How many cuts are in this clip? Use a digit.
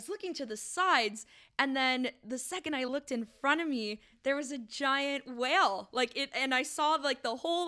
0